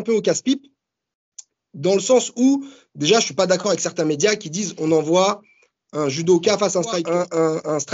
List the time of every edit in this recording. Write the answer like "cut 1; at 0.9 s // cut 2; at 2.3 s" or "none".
cut 1; at 7.0 s